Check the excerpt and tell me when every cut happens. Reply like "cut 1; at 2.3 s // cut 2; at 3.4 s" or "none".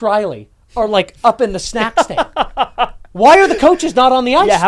none